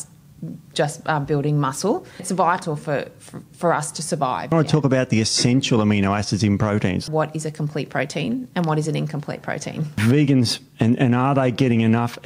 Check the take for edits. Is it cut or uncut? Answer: cut